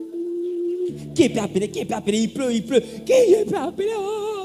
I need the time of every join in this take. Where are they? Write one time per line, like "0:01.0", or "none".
none